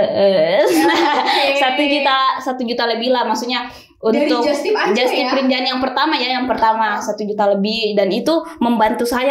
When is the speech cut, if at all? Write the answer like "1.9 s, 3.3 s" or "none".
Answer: none